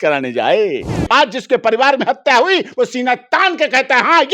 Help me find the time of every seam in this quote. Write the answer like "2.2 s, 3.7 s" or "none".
1.0 s